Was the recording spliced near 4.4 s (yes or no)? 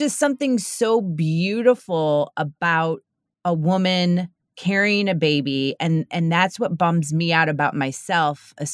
no